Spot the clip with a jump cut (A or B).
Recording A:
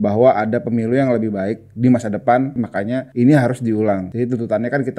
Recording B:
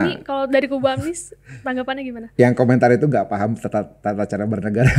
A